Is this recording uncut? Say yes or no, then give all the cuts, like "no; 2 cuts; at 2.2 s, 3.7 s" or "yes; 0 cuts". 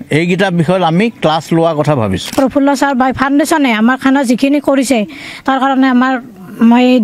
no; 1 cut; at 2.3 s